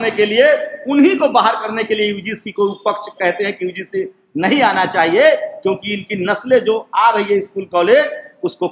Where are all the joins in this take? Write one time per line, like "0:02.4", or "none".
none